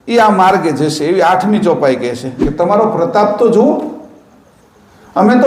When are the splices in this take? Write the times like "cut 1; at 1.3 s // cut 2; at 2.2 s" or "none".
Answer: cut 1; at 2.5 s